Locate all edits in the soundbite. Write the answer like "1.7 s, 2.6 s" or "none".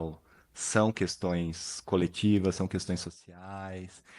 none